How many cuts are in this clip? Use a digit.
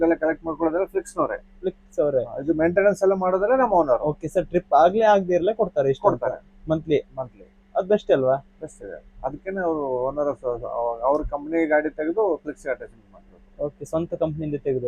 0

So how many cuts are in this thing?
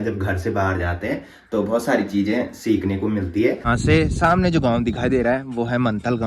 1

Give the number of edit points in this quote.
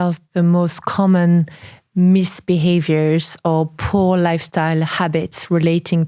0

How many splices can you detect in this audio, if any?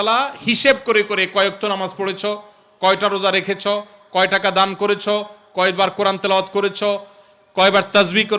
0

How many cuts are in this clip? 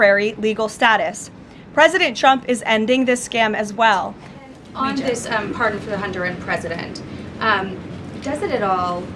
1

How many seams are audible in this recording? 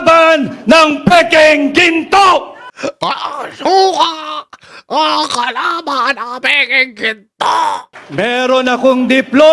1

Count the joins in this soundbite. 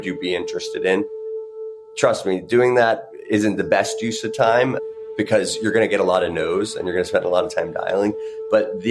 1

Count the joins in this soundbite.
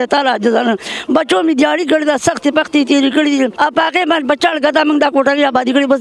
1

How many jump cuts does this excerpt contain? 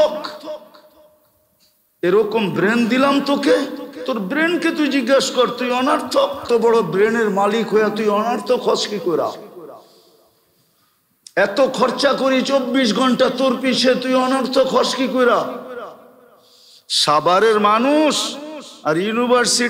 1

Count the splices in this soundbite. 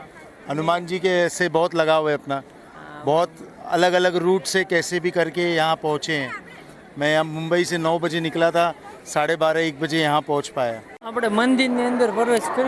1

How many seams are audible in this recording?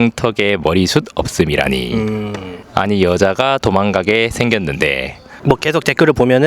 1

